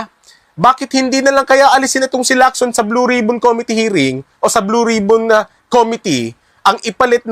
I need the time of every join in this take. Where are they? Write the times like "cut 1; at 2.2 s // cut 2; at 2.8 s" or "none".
cut 1; at 1.1 s

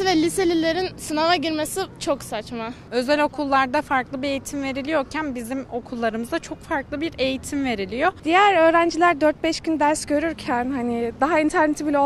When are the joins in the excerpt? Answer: cut 1; at 2.8 s // cut 2; at 8.2 s

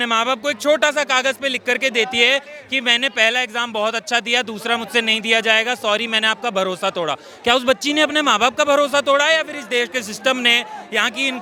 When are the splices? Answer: none

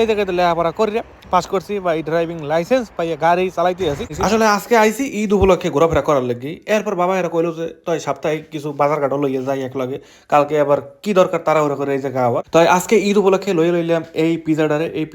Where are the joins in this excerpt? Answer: cut 1; at 4.0 s // cut 2; at 12.4 s

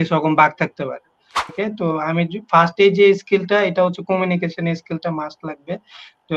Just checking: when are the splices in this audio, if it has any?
cut 1; at 1.4 s

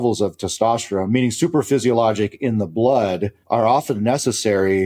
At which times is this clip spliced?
cut 1; at 3.3 s

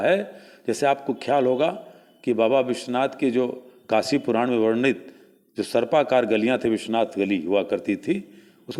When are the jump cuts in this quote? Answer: none

